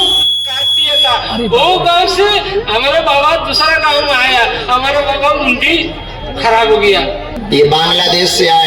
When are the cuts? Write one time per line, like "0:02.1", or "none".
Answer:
0:07.3